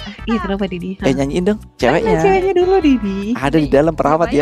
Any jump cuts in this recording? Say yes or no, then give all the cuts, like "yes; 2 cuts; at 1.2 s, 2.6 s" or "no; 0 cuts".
yes; 1 cut; at 1.7 s